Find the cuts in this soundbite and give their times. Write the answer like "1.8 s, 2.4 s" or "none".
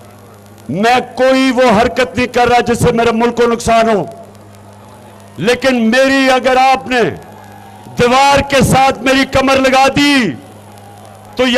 none

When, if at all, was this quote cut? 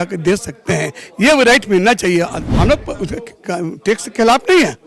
2.4 s

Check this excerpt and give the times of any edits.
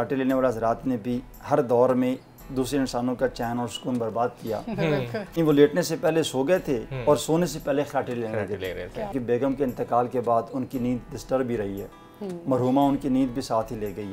5.4 s, 9.1 s

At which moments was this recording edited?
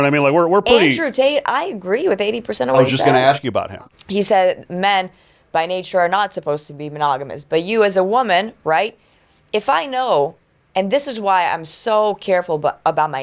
3.8 s

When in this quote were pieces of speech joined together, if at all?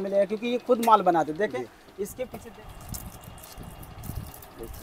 2.4 s

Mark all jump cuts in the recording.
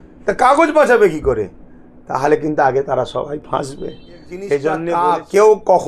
4.9 s

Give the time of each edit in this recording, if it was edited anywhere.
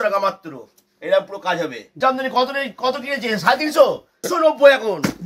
1.8 s

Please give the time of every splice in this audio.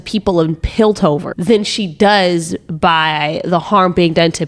1.3 s

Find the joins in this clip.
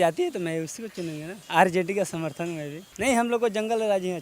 1.3 s, 2.8 s

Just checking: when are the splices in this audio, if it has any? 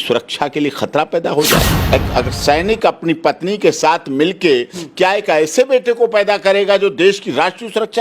1.7 s

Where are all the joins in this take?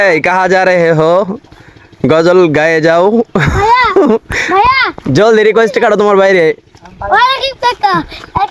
none

